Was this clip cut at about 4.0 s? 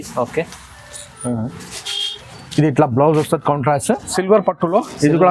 yes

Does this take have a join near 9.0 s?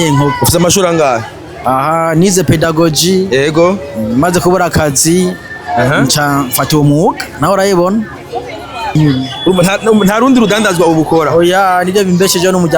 yes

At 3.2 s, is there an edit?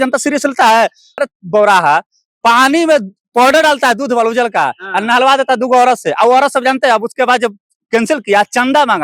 no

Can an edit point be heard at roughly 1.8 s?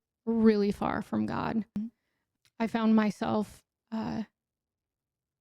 yes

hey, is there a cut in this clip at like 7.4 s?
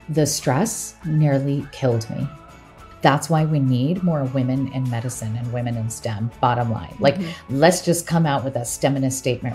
no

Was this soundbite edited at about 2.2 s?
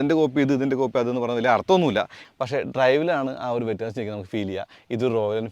yes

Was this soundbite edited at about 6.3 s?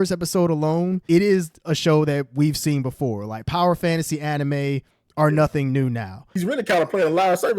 yes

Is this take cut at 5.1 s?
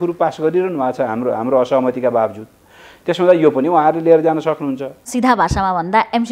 yes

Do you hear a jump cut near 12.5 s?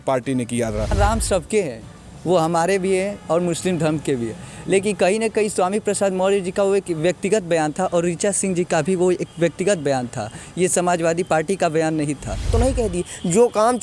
yes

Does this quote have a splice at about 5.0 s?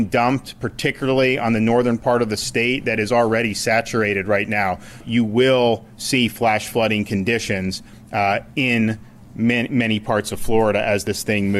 yes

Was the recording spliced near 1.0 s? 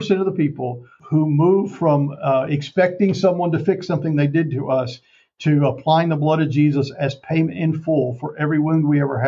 yes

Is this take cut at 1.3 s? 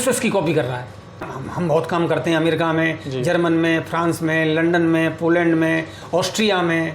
yes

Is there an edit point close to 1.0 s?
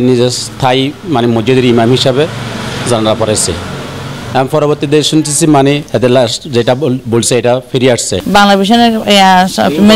no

